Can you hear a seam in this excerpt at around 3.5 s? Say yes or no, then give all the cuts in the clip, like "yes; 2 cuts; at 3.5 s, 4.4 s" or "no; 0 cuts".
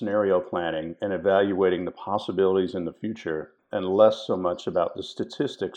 yes; 1 cut; at 3.5 s